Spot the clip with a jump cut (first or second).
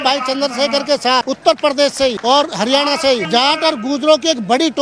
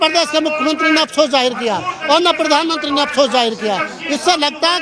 first